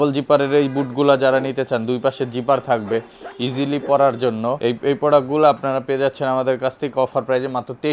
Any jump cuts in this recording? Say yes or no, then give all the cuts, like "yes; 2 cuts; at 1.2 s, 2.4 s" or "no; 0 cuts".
no; 0 cuts